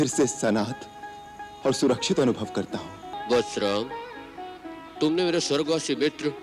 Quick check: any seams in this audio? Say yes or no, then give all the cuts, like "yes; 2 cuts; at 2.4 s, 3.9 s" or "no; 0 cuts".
yes; 1 cut; at 3.2 s